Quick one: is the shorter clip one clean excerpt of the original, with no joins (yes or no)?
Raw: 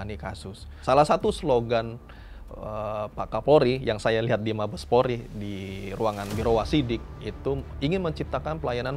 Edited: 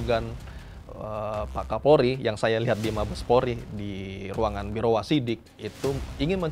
yes